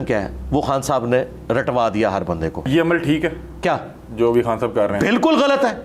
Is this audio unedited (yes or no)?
no